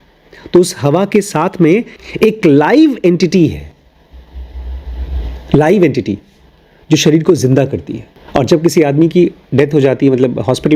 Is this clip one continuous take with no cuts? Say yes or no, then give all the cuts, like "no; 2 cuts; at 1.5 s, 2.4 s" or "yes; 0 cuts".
yes; 0 cuts